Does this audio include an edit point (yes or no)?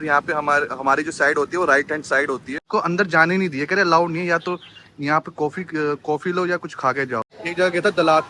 yes